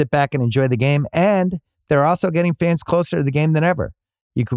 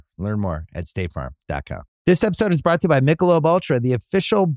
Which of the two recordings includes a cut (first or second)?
second